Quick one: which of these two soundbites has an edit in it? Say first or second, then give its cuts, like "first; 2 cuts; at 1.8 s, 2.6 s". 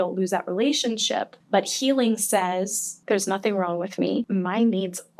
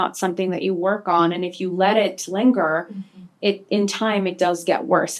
first; 3 cuts; at 1.4 s, 2.9 s, 4.3 s